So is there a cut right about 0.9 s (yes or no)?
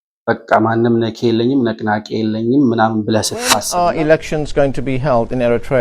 no